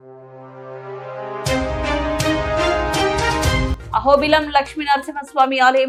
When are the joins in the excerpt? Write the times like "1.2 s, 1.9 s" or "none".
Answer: none